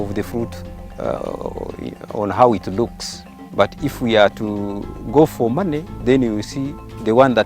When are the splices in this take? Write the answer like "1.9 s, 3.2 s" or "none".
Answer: 3.4 s